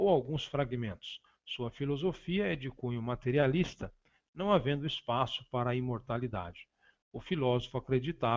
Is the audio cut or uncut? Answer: cut